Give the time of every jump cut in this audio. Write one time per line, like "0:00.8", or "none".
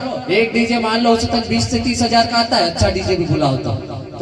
none